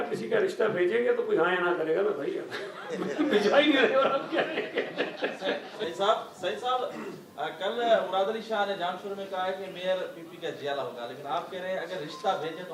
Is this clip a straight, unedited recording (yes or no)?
no